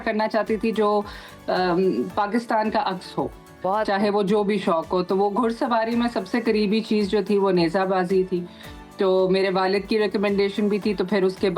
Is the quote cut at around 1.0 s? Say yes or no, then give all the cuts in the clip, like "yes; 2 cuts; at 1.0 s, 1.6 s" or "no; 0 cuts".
no; 0 cuts